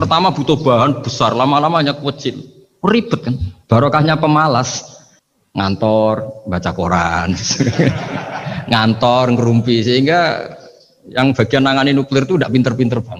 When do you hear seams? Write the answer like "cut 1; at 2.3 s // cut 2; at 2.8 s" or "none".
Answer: none